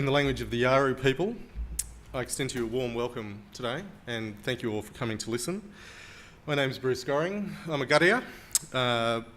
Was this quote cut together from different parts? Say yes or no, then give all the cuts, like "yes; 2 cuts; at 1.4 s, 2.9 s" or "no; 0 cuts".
yes; 1 cut; at 4.6 s